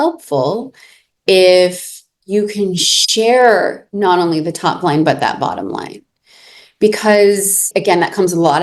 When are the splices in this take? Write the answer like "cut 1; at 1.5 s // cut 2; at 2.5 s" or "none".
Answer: cut 1; at 7.7 s